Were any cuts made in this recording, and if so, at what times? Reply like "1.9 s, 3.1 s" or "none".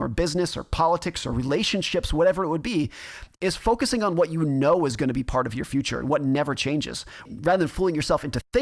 7.3 s

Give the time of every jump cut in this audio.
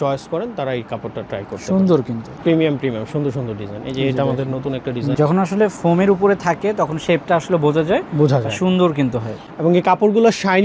2.3 s, 5.1 s

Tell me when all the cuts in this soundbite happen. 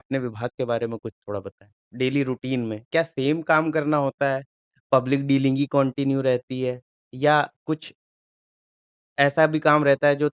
1.8 s

